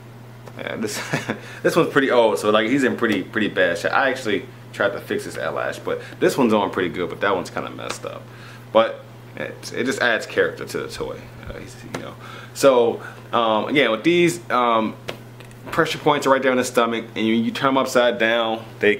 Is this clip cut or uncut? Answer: uncut